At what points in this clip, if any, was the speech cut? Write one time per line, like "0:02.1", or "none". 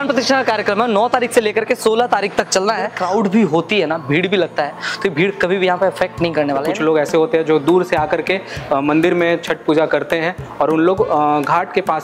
0:03.0
0:06.7